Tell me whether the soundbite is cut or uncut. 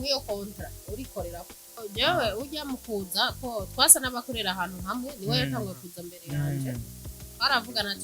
cut